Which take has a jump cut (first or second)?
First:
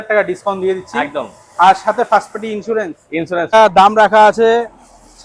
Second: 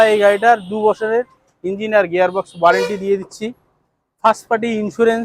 first